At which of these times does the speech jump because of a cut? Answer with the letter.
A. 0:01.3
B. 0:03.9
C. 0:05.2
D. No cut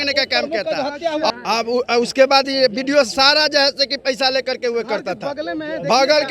A